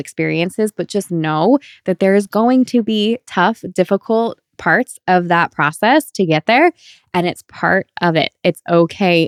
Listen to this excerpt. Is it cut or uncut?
uncut